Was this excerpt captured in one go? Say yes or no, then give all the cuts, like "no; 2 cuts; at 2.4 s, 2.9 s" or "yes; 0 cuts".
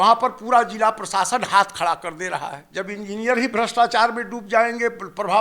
no; 1 cut; at 2.6 s